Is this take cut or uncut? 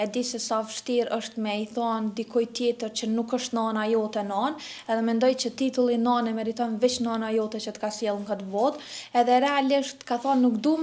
uncut